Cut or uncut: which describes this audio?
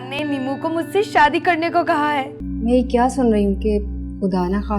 cut